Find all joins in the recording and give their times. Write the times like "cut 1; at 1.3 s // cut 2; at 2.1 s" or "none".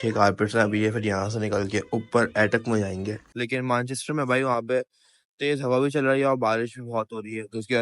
cut 1; at 3.2 s